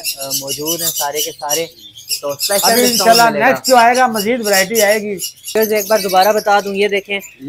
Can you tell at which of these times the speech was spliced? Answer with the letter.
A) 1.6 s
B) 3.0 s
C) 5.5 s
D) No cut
C